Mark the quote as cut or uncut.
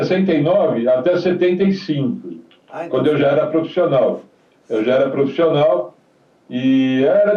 uncut